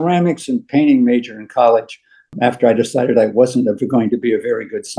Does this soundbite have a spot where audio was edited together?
no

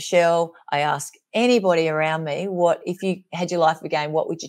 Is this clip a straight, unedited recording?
yes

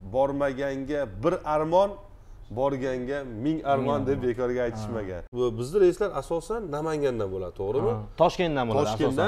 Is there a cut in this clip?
yes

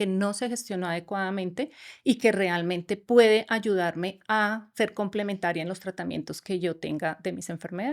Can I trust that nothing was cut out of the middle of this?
yes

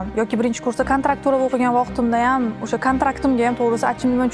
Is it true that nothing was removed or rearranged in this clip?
yes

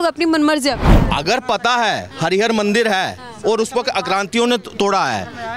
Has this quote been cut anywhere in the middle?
yes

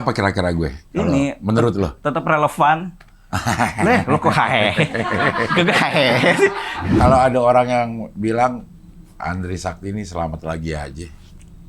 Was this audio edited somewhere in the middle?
yes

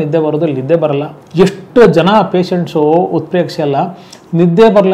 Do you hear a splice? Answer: yes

